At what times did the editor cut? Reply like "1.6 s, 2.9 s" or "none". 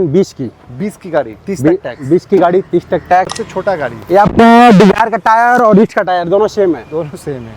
3.4 s